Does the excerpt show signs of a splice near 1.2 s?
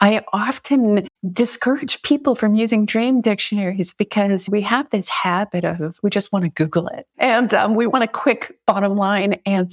yes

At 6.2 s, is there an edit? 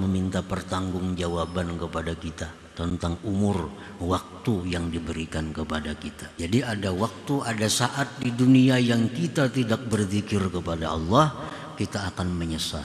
yes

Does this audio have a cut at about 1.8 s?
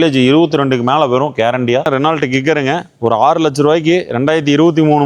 yes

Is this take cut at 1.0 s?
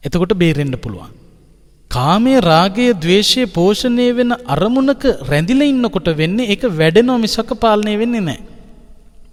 no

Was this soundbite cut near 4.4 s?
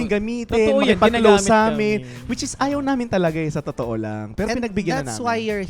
no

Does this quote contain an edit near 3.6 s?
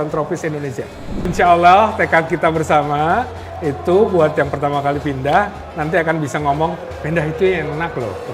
no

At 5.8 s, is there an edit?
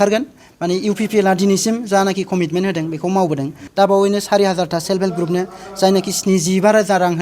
no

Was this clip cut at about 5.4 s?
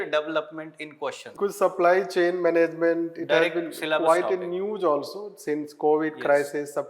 no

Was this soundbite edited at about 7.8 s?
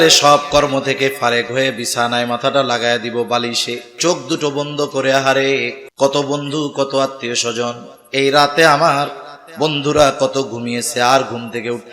no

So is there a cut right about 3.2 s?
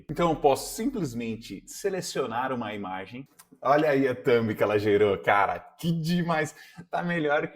yes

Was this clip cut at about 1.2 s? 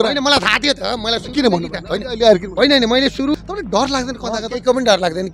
no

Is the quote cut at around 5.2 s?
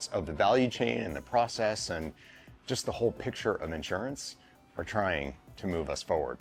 no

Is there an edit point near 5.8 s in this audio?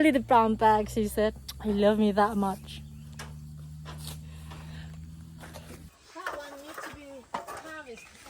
yes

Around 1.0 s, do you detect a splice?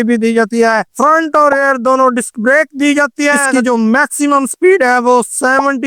yes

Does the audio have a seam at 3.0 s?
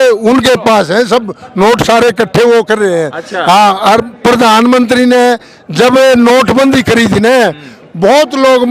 no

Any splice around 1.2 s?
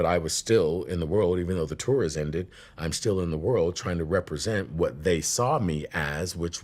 yes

